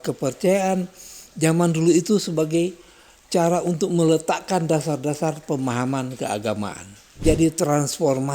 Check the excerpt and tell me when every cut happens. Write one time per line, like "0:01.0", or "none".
0:07.2